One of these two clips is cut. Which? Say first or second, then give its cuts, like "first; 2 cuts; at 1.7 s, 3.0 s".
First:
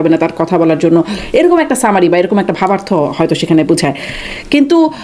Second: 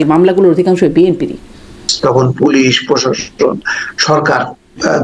second; 1 cut; at 1.8 s